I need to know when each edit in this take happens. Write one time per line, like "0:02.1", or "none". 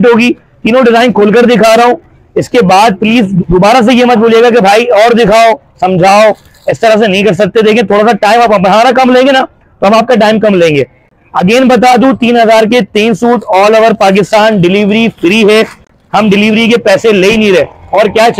none